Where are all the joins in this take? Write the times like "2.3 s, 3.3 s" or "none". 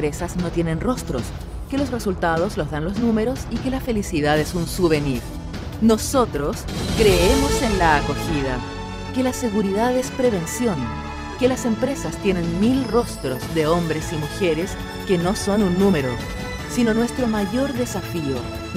none